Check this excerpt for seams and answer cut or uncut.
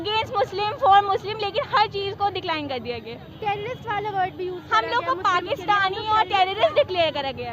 uncut